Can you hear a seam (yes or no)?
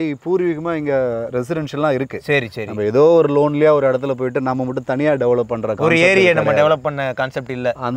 no